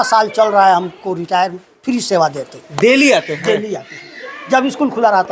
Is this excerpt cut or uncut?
cut